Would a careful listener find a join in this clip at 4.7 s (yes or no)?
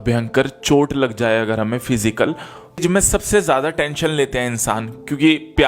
no